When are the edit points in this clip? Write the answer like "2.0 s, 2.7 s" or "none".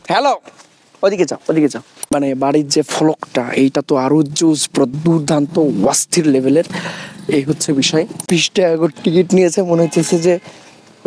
2.1 s, 8.2 s